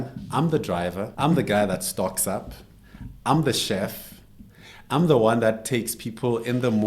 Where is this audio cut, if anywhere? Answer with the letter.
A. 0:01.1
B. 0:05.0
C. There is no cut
A